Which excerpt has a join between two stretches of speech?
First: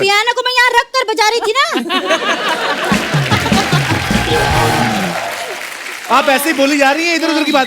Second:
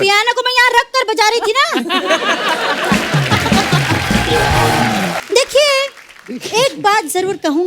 second; 1 cut; at 5.2 s

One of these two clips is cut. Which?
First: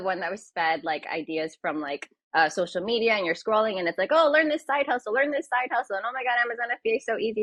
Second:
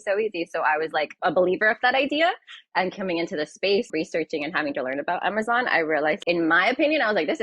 second; 3 cuts; at 1.1 s, 3.9 s, 6.2 s

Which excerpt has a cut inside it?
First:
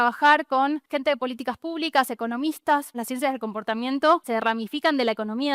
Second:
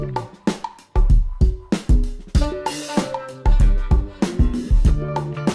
first; 3 cuts; at 0.8 s, 3.0 s, 4.2 s

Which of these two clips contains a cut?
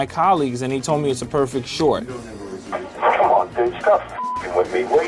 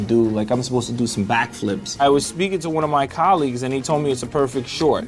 second; 1 cut; at 1.9 s

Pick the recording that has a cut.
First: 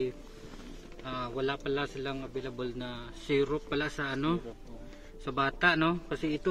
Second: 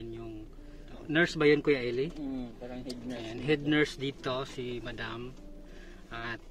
second; 1 cut; at 0.9 s

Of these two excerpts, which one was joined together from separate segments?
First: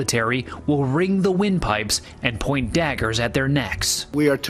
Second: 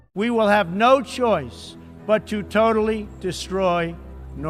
first; 1 cut; at 2.5 s

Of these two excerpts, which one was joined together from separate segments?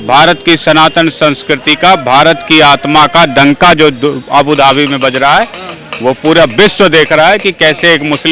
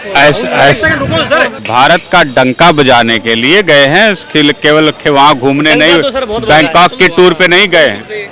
second; 1 cut; at 1.7 s

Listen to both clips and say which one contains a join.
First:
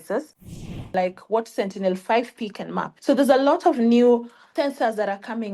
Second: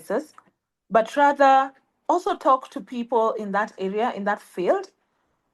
first; 3 cuts; at 0.9 s, 2.9 s, 4.4 s

